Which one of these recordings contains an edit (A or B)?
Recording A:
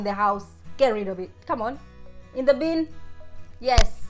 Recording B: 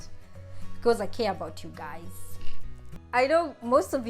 B